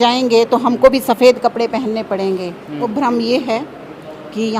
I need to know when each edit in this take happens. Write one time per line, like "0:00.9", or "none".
0:02.8